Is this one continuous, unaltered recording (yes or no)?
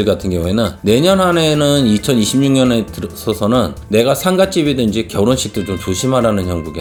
yes